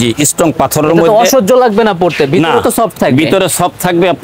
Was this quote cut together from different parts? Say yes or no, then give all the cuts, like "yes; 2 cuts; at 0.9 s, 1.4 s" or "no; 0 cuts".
no; 0 cuts